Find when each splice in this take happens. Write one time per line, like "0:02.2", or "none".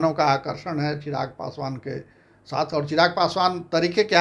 none